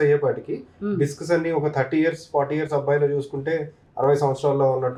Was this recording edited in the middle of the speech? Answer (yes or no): no